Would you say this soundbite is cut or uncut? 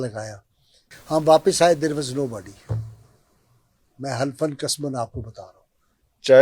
cut